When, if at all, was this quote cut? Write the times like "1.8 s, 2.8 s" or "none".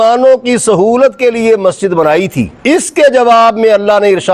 2.5 s